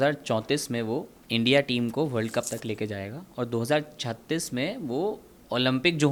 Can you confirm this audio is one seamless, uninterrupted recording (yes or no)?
yes